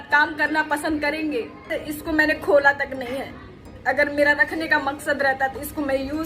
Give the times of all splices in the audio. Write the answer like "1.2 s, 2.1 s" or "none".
1.7 s